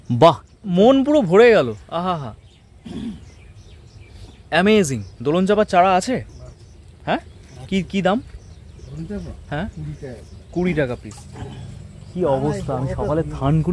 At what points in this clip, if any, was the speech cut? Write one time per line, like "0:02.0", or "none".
0:00.7
0:10.8